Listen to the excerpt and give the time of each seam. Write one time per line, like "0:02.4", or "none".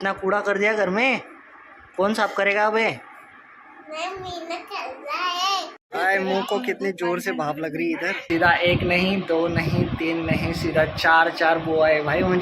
0:05.8
0:08.2